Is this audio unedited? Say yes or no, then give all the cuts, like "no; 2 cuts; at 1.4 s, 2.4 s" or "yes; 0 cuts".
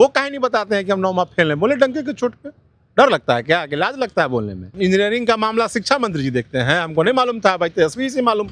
no; 1 cut; at 4.7 s